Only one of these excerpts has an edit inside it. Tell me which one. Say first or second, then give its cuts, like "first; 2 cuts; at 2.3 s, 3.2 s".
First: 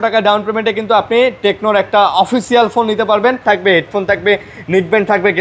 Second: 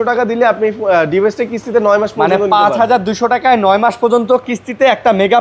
first; 1 cut; at 3.4 s